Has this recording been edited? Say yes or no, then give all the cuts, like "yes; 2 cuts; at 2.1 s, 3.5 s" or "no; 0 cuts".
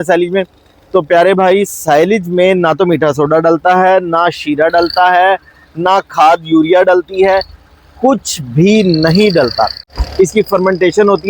yes; 1 cut; at 10.0 s